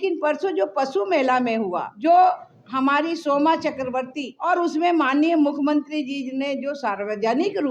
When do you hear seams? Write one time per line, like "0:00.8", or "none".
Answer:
0:01.9
0:04.3